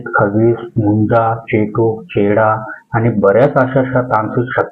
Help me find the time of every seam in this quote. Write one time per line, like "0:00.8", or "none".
none